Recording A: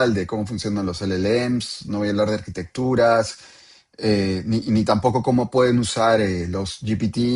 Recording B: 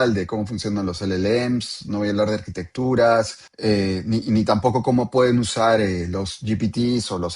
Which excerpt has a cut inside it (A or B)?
B